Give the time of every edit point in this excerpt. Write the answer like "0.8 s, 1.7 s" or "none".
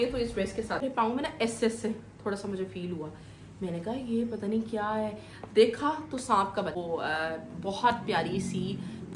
0.8 s, 6.8 s